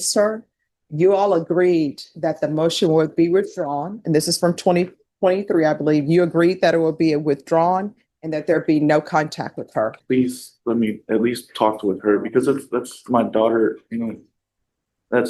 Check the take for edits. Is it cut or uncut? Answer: cut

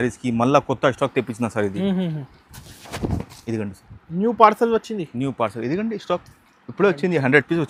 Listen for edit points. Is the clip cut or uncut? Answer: uncut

